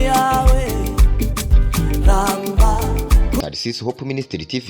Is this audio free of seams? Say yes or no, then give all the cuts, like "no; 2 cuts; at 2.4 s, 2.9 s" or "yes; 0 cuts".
no; 1 cut; at 3.4 s